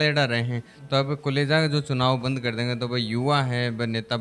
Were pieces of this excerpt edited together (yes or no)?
no